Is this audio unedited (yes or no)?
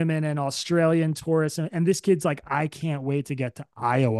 yes